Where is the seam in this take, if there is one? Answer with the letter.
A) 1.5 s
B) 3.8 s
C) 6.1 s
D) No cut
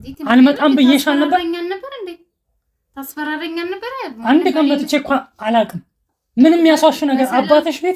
D